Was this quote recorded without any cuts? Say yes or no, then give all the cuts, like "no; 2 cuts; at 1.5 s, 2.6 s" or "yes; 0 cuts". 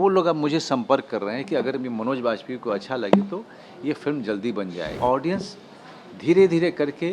no; 1 cut; at 4.9 s